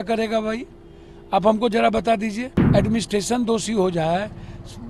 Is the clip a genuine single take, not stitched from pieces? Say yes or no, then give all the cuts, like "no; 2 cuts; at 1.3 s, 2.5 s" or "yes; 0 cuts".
no; 1 cut; at 2.5 s